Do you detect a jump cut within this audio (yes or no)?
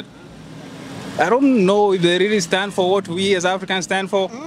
no